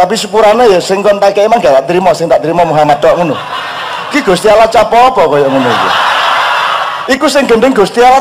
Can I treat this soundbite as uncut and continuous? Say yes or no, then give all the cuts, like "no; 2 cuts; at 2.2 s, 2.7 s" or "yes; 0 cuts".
no; 1 cut; at 7.0 s